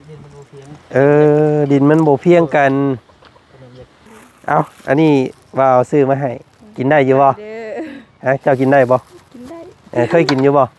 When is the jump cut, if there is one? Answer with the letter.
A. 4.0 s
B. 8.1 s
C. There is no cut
A